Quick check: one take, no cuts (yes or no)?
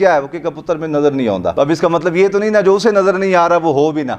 no